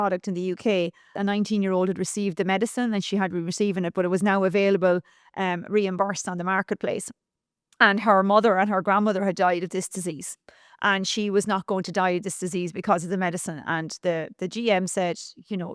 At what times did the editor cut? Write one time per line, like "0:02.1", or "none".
0:01.2

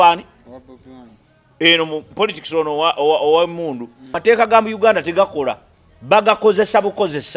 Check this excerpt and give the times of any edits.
0:04.2

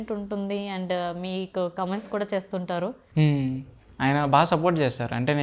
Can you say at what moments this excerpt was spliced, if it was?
none

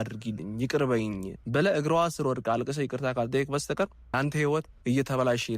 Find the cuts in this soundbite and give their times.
0:01.3
0:04.0

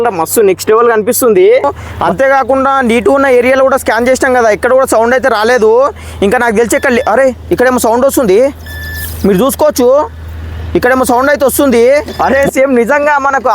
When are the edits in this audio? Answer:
0:01.8
0:12.1

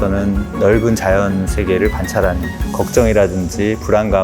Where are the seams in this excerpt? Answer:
0:02.5

